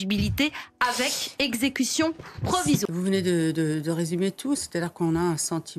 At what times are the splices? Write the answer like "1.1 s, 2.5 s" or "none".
2.8 s